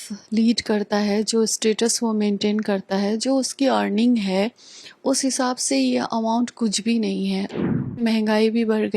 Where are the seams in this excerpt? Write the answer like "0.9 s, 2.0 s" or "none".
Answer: 8.0 s